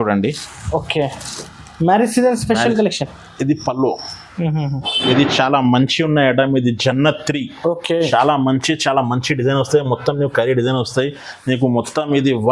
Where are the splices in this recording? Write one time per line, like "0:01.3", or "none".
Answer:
0:05.0